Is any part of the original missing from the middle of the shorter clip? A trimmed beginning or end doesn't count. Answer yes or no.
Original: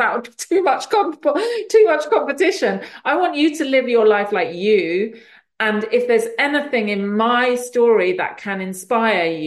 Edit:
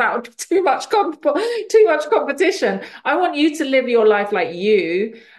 no